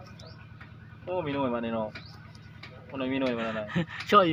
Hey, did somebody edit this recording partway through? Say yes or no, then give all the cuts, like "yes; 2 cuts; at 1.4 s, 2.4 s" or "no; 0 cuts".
no; 0 cuts